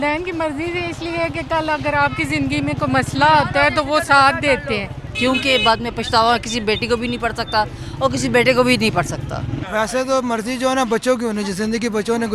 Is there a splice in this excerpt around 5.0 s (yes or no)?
yes